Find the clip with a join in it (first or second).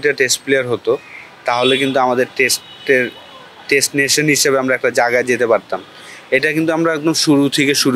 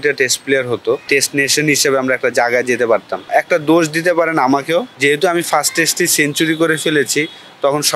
second